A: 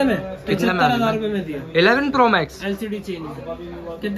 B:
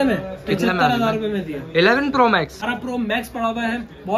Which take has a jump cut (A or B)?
B